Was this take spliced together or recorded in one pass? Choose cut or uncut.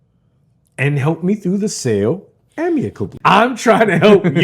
cut